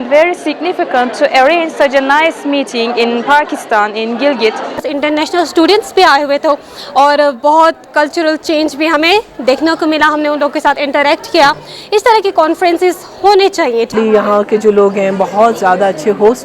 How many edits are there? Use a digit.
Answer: 2